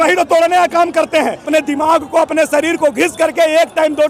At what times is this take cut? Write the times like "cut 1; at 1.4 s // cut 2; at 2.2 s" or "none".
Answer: cut 1; at 1.5 s